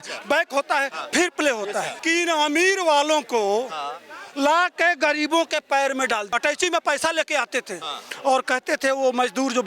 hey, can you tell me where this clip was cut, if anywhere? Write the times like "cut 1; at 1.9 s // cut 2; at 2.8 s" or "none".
cut 1; at 2.0 s // cut 2; at 6.3 s